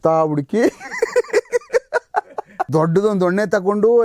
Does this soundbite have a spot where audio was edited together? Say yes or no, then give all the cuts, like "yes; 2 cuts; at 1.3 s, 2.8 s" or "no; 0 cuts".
yes; 1 cut; at 2.5 s